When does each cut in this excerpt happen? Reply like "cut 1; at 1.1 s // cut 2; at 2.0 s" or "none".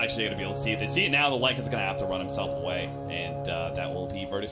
cut 1; at 1.5 s